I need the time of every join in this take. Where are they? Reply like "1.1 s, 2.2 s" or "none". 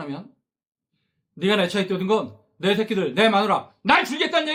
none

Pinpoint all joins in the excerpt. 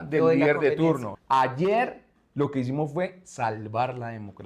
1.1 s

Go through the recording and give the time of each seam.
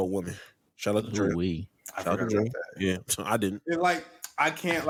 none

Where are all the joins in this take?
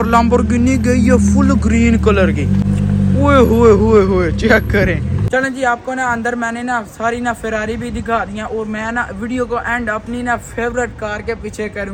none

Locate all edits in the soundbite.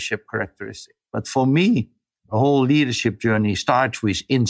2.0 s, 3.6 s

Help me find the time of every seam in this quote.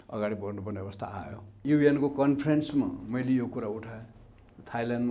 1.6 s

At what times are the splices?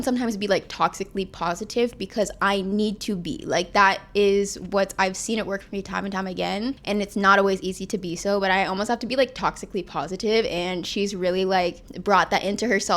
none

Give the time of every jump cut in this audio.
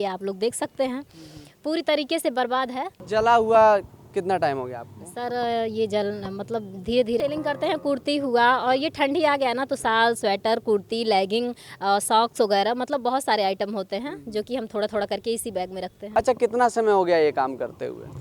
3.0 s, 7.2 s, 16.0 s

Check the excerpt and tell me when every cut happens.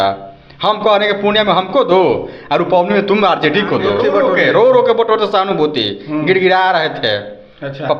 3.9 s

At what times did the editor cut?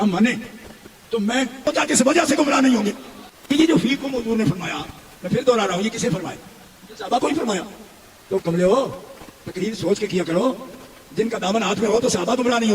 1.7 s

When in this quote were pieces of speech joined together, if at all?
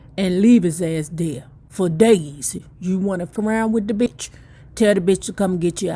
3.3 s, 4.1 s

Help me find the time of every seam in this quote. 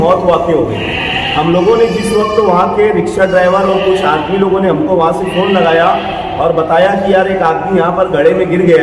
none

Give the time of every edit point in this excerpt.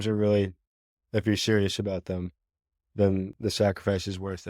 none

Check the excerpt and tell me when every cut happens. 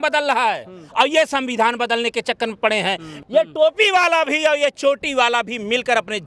3.1 s

